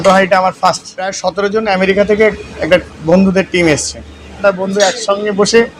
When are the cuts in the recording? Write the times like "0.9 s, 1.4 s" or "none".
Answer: 1.2 s, 4.4 s